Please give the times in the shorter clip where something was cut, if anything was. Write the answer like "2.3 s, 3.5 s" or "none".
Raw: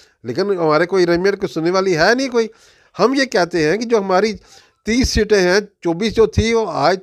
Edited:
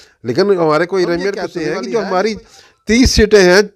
1.5 s